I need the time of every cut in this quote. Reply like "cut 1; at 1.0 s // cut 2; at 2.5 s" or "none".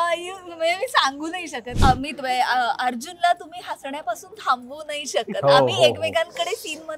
cut 1; at 1.7 s